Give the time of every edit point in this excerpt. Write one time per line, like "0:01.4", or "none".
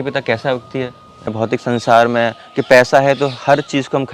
0:01.3

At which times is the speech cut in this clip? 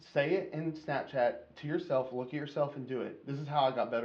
none

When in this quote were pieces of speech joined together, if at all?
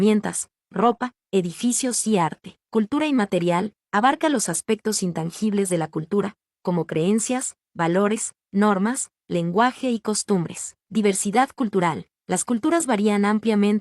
0:02.5
0:10.8

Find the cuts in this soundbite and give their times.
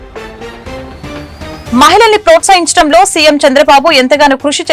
0:01.6

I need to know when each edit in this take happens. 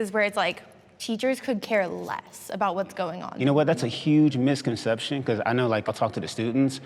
0:03.4
0:05.9

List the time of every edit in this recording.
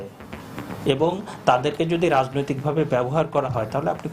none

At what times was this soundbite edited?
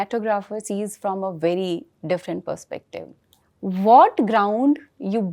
none

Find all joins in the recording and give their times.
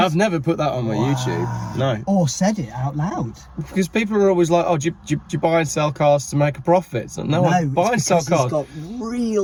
none

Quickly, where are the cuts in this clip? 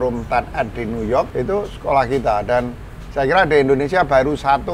0:01.3

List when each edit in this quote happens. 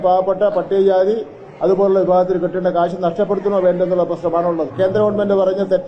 0:04.7

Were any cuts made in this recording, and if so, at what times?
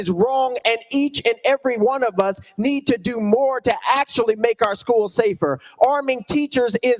none

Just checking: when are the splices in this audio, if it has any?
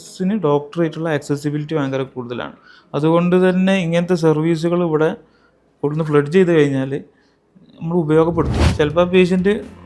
0:08.7

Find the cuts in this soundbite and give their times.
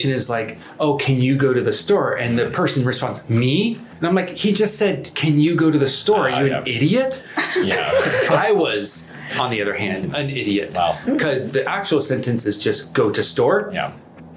none

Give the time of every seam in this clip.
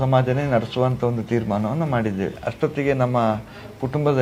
none

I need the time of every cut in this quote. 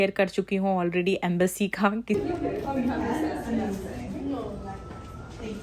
0:02.2

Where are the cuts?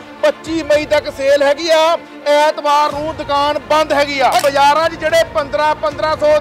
0:04.4

